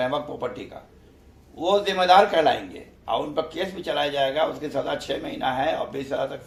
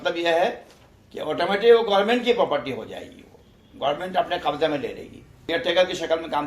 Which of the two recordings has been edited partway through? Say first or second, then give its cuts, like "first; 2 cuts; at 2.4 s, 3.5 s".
second; 1 cut; at 5.4 s